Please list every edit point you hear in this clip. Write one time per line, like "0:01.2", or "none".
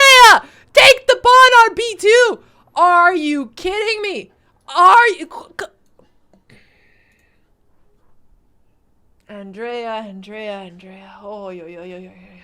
0:09.2